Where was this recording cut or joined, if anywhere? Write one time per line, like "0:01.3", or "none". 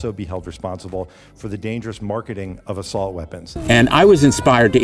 0:03.5